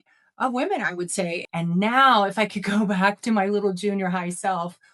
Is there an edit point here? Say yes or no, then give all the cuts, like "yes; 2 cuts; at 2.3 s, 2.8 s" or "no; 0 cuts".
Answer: yes; 1 cut; at 1.4 s